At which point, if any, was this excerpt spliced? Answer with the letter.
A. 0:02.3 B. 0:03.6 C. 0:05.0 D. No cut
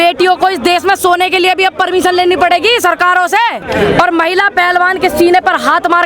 B